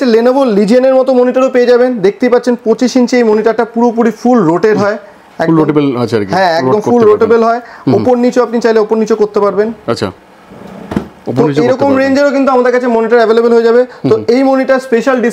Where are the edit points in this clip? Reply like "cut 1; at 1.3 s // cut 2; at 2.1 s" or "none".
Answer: none